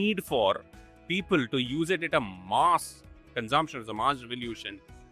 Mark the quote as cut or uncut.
uncut